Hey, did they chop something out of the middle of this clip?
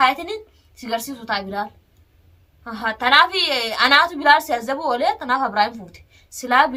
no; 0 cuts

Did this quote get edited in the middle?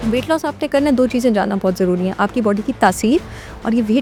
no; 0 cuts

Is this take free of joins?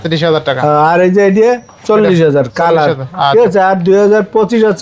yes; 0 cuts

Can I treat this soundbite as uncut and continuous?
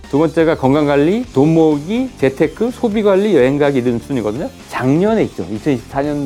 yes; 0 cuts

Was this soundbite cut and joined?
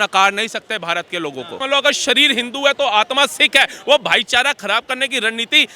yes; 1 cut; at 1.6 s

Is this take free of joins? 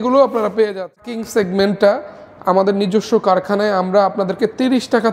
no; 1 cut; at 1.0 s

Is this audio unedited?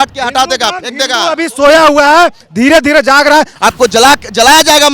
no; 1 cut; at 3.5 s

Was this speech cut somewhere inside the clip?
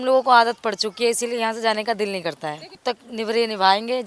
yes; 1 cut; at 2.8 s

